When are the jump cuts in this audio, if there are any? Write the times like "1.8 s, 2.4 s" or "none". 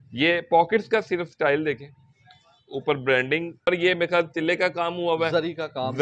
3.7 s

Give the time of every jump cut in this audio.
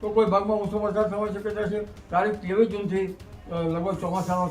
1.9 s

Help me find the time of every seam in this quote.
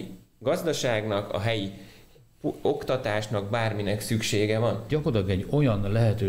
4.8 s

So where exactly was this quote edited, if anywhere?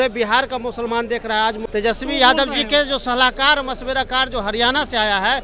1.6 s

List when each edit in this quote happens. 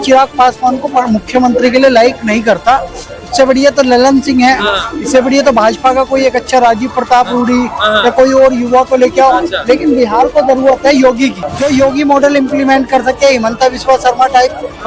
11.5 s

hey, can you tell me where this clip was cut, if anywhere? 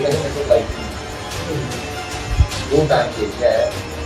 none

